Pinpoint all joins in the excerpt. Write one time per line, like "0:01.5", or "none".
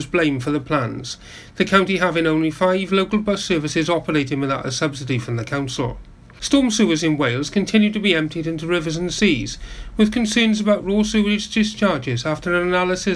0:06.4